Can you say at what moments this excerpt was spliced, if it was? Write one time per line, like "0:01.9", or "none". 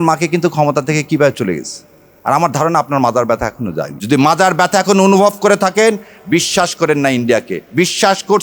0:03.9